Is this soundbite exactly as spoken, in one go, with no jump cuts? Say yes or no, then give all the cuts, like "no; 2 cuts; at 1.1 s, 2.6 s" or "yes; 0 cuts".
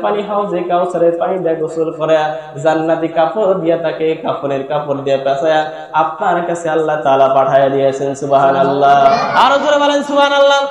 no; 1 cut; at 9.1 s